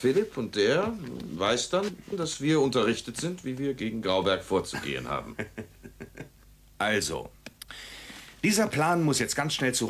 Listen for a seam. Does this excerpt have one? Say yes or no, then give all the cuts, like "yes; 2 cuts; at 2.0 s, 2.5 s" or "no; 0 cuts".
yes; 1 cut; at 4.2 s